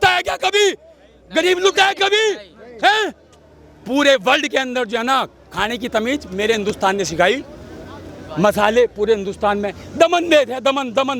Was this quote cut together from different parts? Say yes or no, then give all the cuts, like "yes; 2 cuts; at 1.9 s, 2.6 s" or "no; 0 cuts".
no; 0 cuts